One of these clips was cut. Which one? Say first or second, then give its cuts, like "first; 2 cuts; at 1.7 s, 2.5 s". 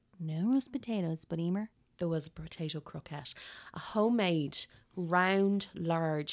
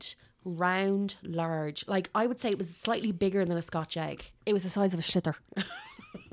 first; 1 cut; at 1.8 s